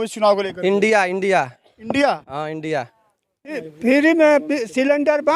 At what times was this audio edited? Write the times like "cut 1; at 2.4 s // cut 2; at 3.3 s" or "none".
cut 1; at 3.6 s